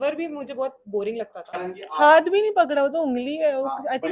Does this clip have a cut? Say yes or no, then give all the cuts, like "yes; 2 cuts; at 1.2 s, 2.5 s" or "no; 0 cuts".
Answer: yes; 1 cut; at 1.6 s